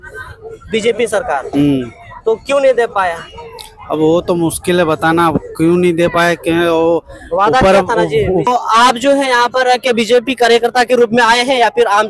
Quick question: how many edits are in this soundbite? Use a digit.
1